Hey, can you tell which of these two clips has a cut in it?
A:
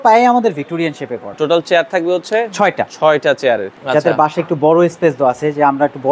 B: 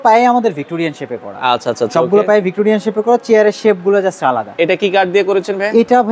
A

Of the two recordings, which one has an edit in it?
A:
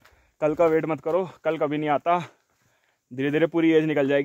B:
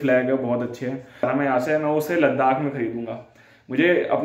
B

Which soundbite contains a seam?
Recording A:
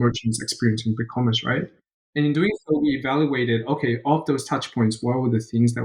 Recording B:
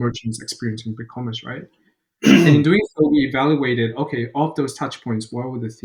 A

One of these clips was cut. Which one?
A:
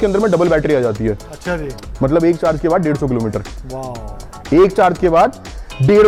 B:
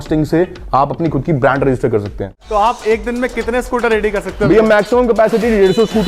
B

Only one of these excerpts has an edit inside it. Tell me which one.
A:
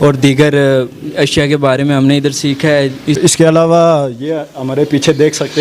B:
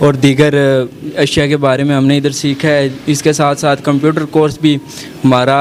A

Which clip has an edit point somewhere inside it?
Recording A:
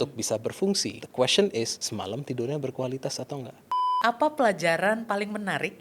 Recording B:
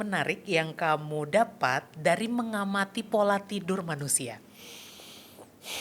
A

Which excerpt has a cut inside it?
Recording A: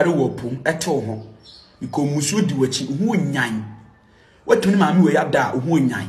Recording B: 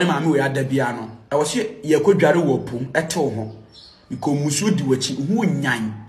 B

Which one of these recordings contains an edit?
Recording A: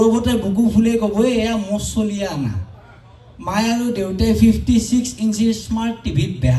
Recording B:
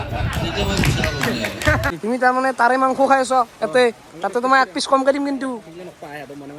B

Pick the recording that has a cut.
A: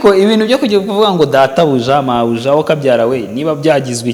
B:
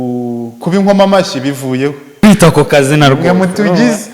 B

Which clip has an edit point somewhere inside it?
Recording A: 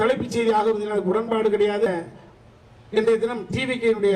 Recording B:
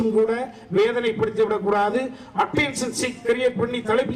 A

